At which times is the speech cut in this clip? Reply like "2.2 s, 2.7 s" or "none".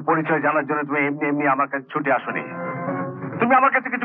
none